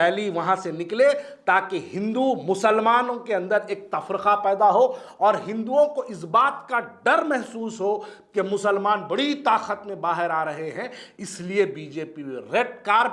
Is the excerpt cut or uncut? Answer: uncut